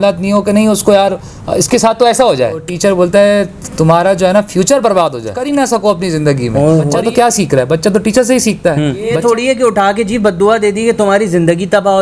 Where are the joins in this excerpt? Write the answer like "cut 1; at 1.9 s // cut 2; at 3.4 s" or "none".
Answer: cut 1; at 2.7 s // cut 2; at 4.8 s // cut 3; at 7.0 s // cut 4; at 9.1 s